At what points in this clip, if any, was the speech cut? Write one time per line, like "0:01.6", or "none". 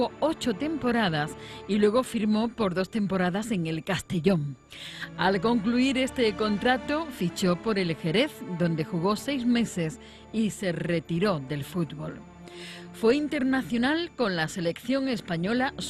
0:08.7